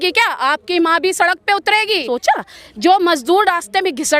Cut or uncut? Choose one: cut